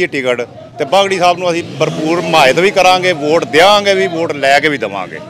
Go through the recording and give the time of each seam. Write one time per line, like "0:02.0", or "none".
none